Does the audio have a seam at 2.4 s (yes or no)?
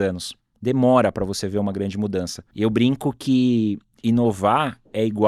yes